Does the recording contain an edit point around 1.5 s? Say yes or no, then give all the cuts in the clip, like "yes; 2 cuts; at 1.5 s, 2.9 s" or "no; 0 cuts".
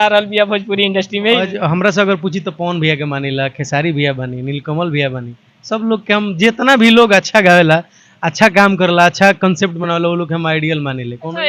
yes; 1 cut; at 1.5 s